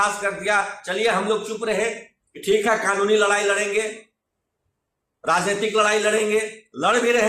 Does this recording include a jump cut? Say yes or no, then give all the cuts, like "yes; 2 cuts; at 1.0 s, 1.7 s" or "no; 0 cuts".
no; 0 cuts